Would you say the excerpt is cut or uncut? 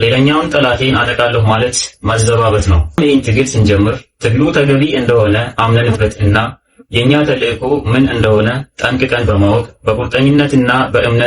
cut